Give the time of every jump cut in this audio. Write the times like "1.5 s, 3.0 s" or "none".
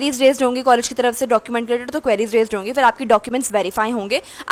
none